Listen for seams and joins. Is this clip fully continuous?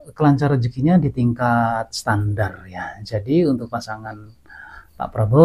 yes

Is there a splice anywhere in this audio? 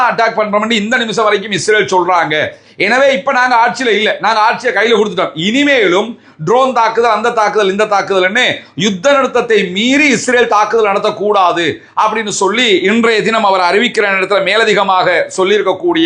no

